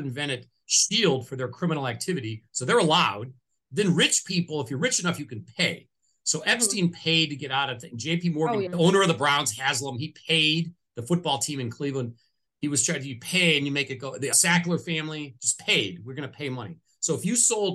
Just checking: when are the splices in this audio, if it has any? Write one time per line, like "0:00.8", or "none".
0:08.7
0:14.3